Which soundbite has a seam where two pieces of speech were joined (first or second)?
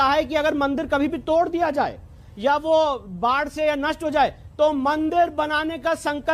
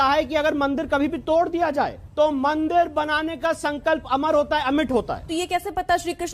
second